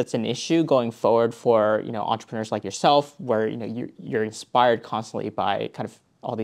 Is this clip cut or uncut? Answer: uncut